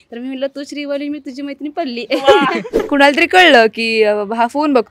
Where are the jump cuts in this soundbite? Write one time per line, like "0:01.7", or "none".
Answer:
0:02.1
0:02.9